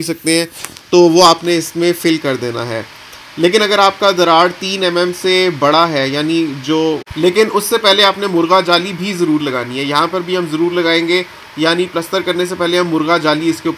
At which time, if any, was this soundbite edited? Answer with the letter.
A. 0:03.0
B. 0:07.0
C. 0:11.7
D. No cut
B